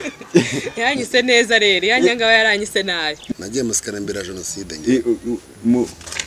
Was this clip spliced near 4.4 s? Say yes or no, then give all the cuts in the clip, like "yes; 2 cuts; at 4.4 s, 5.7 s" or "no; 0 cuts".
no; 1 cut; at 3.2 s